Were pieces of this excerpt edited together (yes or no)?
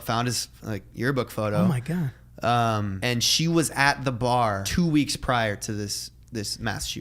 yes